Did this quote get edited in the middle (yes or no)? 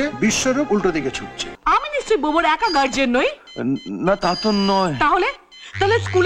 yes